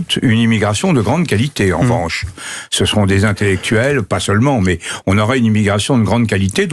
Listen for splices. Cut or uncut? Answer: uncut